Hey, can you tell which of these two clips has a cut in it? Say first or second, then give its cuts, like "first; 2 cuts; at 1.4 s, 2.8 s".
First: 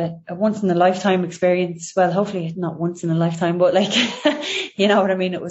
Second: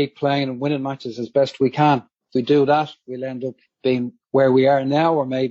second; 1 cut; at 4.2 s